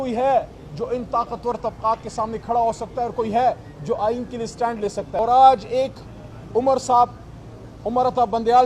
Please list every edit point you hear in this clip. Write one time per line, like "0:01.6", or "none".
0:05.1